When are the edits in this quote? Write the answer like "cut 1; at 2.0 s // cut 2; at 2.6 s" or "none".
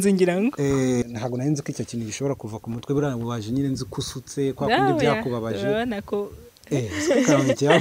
cut 1; at 1.0 s